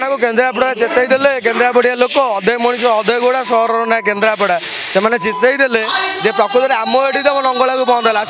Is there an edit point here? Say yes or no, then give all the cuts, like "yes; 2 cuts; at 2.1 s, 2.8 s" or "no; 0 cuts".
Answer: no; 0 cuts